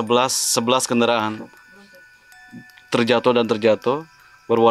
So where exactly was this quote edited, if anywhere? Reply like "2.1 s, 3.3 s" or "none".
none